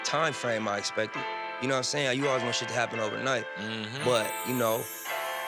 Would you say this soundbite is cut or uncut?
uncut